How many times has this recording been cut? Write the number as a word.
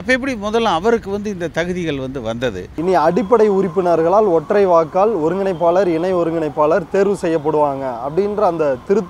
one